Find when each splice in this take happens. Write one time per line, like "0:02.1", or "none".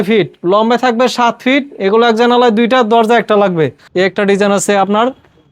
0:03.8